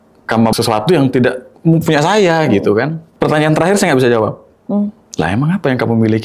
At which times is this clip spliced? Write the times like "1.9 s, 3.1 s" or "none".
3.0 s, 5.0 s